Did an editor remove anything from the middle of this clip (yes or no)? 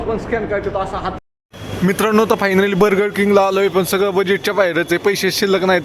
yes